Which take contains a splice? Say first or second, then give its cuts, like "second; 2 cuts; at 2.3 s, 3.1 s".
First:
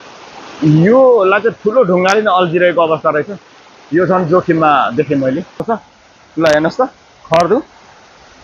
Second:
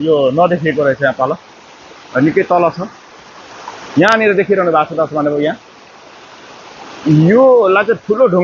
first; 1 cut; at 5.6 s